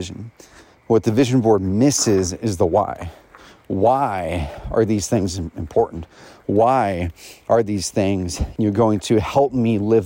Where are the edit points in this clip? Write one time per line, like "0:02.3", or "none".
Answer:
0:08.4

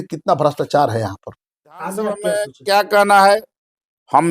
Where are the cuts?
0:02.3

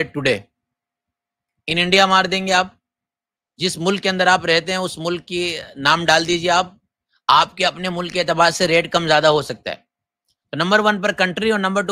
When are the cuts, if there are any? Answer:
none

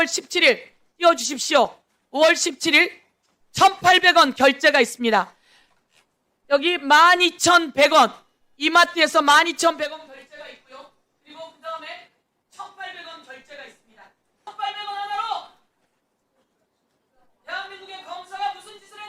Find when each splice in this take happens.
0:14.5

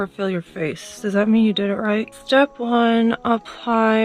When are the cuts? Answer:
none

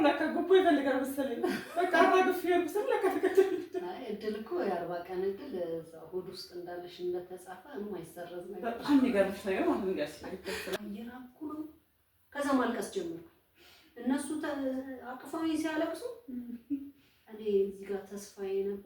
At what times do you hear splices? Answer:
0:10.8

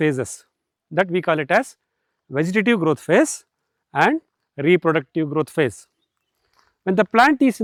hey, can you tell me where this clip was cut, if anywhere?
none

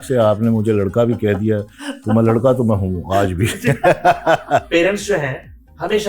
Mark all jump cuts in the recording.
0:04.7

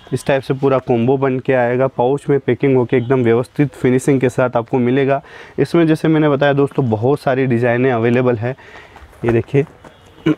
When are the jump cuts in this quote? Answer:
none

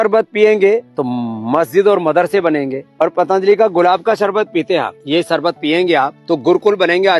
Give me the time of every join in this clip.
0:01.0
0:02.8
0:05.0
0:06.2

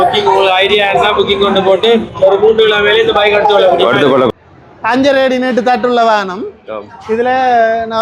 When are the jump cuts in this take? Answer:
0:04.3

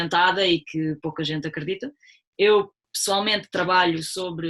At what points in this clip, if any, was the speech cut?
none

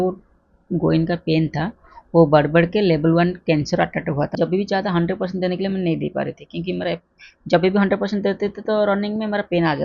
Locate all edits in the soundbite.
0:04.3

